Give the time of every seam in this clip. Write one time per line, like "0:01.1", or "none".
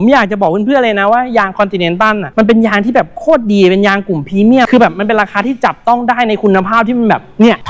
0:04.7